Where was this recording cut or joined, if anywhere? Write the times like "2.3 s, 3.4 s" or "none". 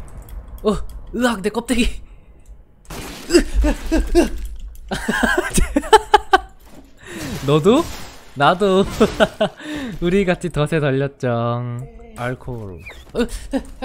12.0 s